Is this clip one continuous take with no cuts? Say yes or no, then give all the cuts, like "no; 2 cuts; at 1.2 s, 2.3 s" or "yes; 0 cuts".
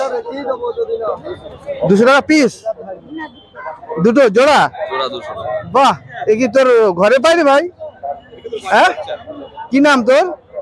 yes; 0 cuts